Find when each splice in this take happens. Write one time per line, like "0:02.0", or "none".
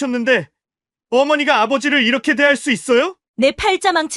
0:03.2